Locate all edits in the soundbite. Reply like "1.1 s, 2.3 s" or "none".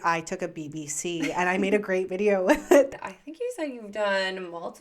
2.9 s